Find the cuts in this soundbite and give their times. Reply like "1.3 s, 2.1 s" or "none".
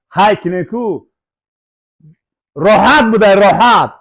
none